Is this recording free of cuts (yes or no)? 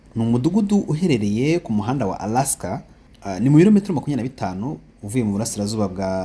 yes